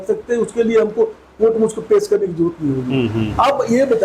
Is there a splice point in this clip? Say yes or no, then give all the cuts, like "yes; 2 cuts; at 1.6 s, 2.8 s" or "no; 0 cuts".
no; 0 cuts